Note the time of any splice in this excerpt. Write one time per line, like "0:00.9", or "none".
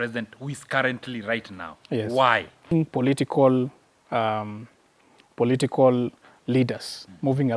0:02.7

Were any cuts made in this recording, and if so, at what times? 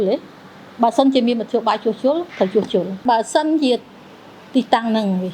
0:03.0

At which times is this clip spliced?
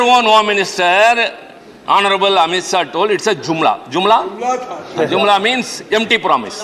none

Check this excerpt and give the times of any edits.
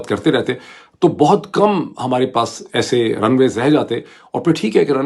none

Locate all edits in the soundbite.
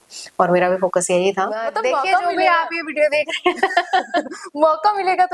0:01.7

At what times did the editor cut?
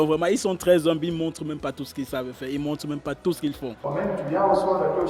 0:03.8

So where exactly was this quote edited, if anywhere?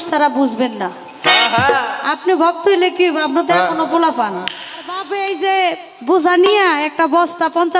0:05.0

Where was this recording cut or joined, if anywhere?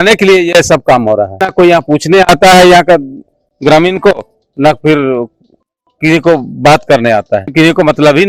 0:01.4
0:07.5

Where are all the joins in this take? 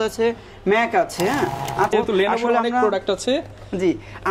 0:01.9

